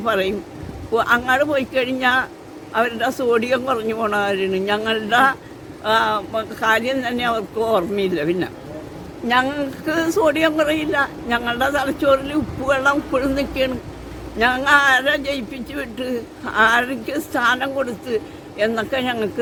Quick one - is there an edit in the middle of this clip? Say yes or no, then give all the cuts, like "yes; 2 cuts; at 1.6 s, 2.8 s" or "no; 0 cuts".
no; 0 cuts